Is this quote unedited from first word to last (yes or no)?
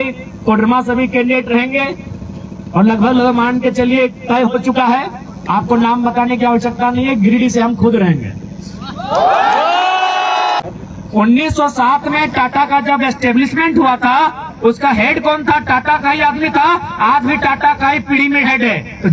no